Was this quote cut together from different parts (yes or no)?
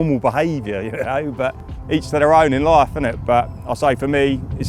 no